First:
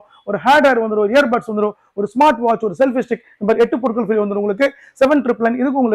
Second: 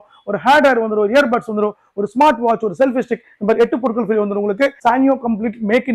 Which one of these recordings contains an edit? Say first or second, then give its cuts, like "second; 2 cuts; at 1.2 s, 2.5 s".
second; 1 cut; at 4.8 s